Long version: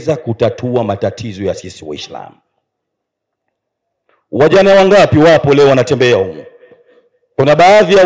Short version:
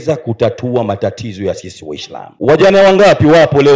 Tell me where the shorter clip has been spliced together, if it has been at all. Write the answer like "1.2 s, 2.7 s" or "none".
2.2 s